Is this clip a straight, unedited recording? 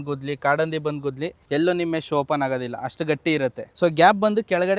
no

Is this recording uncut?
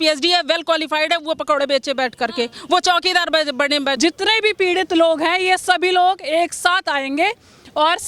no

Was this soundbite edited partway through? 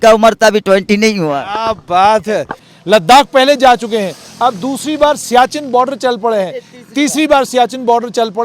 yes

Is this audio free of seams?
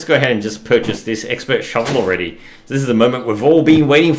yes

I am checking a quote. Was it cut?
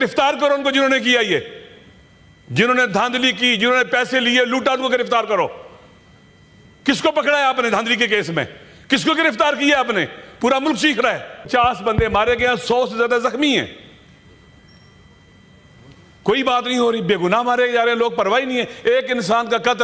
yes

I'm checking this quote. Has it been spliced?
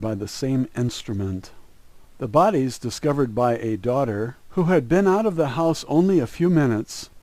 no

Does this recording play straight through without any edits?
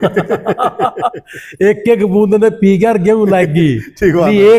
yes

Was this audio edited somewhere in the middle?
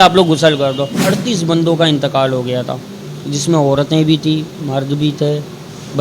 yes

